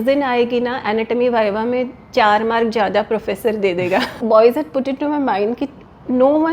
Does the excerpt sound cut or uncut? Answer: cut